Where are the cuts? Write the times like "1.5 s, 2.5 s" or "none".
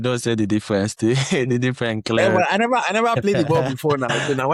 none